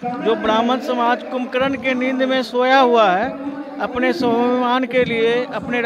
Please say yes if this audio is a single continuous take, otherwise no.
yes